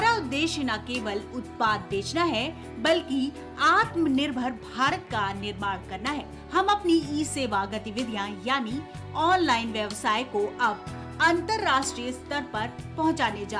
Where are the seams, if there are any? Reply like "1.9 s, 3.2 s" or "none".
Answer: none

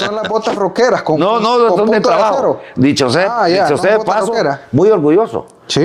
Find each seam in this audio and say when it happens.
none

